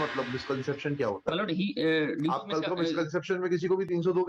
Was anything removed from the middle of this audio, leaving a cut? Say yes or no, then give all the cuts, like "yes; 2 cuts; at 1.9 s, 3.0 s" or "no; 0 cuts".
no; 0 cuts